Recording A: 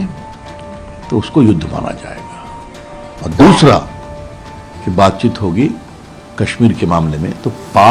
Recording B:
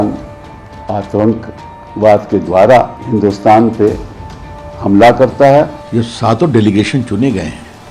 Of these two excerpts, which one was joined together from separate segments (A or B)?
B